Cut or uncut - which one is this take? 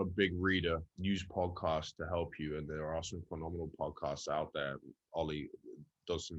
cut